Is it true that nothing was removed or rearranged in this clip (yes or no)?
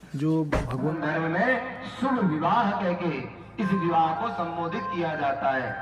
no